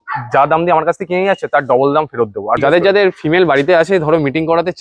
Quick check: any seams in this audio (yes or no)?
yes